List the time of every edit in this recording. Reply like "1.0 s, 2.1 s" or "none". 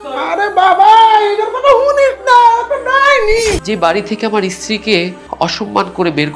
3.6 s, 5.2 s